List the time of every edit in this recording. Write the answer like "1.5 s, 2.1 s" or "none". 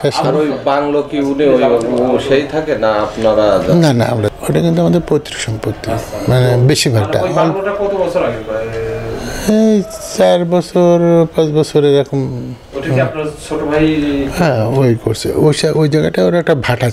4.3 s